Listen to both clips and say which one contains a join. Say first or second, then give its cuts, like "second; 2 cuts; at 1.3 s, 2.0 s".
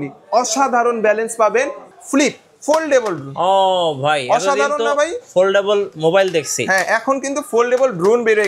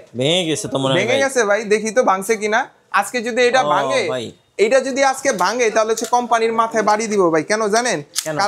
first; 1 cut; at 1.8 s